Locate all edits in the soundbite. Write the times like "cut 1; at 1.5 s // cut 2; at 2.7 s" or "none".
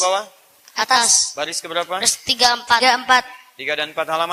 none